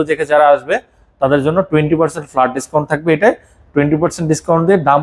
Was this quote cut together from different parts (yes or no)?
no